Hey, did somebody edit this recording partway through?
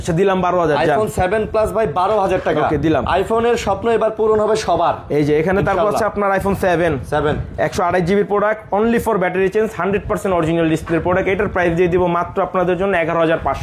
no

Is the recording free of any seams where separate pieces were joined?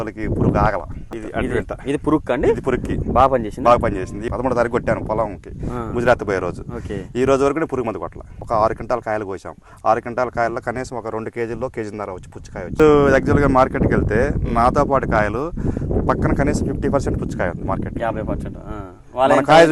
no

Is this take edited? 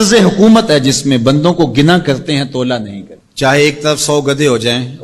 no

